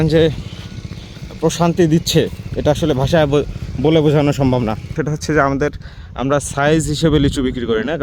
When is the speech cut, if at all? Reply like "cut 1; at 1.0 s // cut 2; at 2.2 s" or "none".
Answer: cut 1; at 5.0 s